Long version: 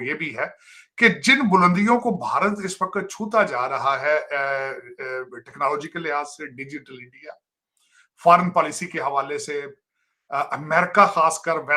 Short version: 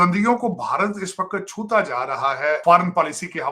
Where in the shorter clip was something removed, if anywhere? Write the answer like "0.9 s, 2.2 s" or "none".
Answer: 2.6 s